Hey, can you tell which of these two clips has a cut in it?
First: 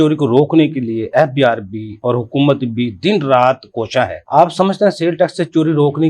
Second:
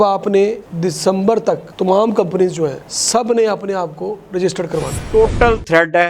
second; 2 cuts; at 2.8 s, 5.0 s

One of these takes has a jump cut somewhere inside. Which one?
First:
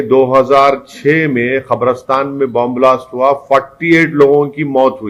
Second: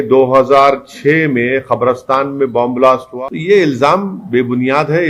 second; 1 cut; at 3.1 s

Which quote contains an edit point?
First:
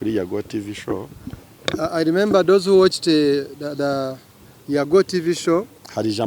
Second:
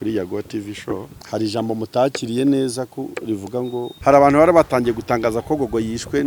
second; 2 cuts; at 1.2 s, 3.9 s

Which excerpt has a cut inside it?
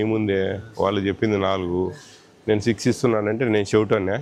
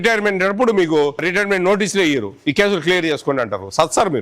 second; 1 cut; at 1.3 s

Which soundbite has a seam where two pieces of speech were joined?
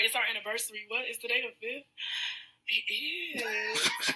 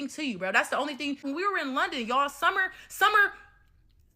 second; 1 cut; at 1.2 s

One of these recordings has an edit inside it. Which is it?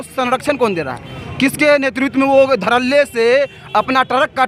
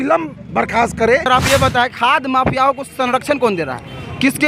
second; 1 cut; at 1.3 s

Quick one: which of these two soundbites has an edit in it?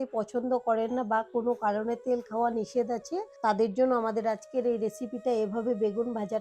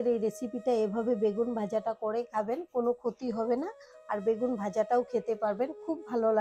first; 1 cut; at 3.3 s

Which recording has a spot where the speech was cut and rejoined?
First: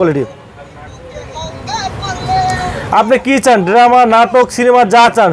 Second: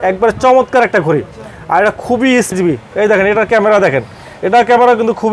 second; 1 cut; at 2.5 s

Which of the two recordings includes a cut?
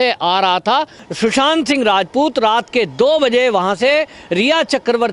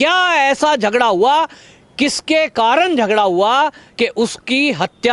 first; 1 cut; at 1.0 s

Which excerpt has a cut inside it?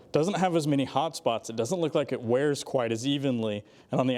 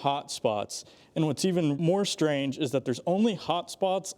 second; 1 cut; at 1.8 s

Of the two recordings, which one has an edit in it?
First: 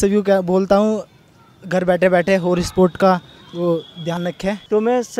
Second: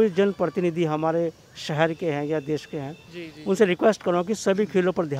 first; 1 cut; at 4.2 s

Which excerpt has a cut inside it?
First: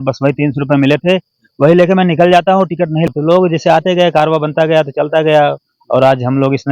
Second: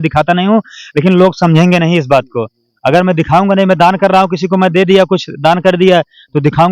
first; 1 cut; at 3.1 s

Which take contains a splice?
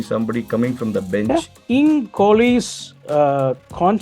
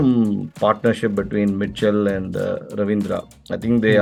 first; 1 cut; at 1.6 s

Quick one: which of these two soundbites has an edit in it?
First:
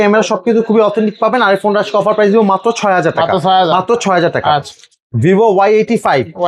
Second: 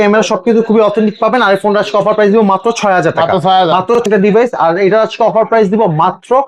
second; 1 cut; at 4.1 s

